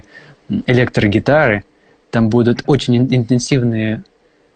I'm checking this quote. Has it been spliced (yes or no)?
no